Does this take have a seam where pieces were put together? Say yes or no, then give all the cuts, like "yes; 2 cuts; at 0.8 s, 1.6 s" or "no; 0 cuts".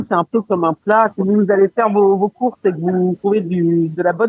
yes; 2 cuts; at 1.1 s, 3.2 s